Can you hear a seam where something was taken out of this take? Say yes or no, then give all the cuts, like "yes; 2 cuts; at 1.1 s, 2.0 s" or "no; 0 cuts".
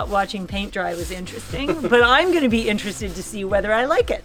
no; 0 cuts